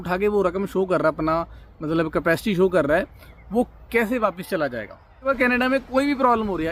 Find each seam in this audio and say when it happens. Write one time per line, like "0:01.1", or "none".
0:05.2